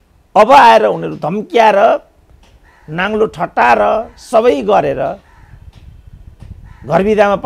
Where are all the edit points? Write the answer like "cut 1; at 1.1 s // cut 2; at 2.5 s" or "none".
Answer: none